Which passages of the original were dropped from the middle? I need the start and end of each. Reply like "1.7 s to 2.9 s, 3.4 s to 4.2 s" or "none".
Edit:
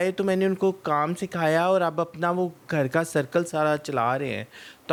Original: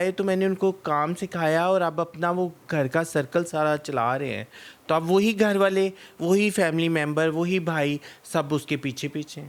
none